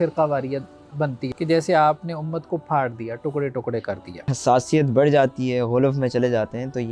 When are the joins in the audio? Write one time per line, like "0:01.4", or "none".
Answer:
0:01.2
0:04.4

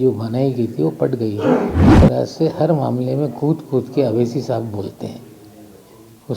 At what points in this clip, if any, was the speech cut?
0:01.9

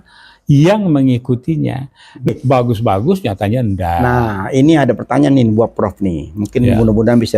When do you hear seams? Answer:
0:02.3

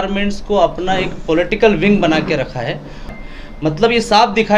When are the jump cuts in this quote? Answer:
0:03.2

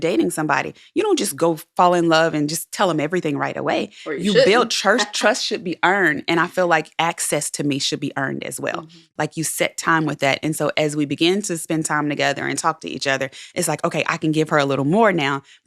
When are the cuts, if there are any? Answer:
none

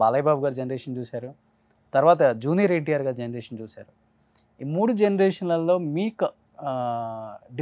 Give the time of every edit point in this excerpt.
none

